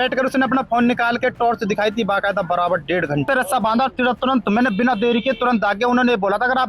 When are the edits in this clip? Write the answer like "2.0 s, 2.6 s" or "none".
3.3 s